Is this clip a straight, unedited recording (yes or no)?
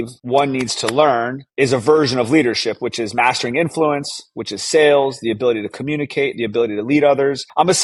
yes